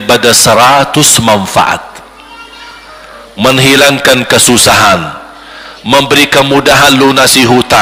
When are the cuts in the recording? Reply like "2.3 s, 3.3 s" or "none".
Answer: none